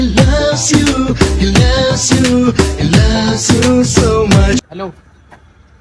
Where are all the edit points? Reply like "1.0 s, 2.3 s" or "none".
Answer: 4.6 s